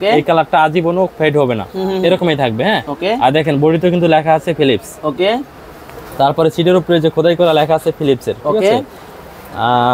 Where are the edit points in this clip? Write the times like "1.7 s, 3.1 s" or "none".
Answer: none